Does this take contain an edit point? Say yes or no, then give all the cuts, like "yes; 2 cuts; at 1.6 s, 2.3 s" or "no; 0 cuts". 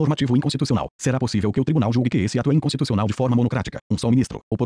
yes; 2 cuts; at 1.0 s, 2.9 s